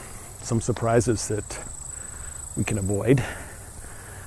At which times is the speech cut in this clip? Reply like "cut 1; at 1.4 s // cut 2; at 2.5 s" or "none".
none